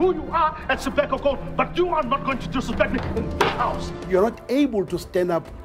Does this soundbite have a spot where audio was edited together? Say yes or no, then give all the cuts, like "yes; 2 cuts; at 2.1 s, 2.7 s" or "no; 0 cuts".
yes; 1 cut; at 3.9 s